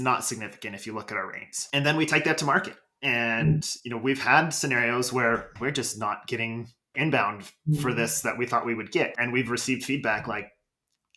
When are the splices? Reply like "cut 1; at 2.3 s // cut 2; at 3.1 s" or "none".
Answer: cut 1; at 6.9 s